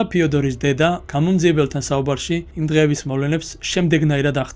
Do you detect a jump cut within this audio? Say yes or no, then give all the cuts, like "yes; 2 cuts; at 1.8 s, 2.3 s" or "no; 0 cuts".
yes; 2 cuts; at 1.0 s, 2.5 s